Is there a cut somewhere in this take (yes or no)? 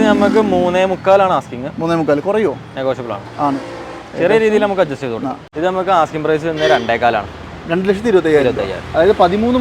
yes